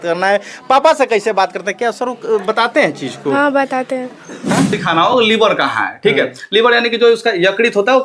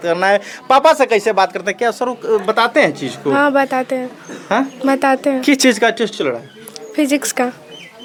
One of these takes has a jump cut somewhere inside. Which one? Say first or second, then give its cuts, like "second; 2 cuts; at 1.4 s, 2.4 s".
first; 1 cut; at 4.8 s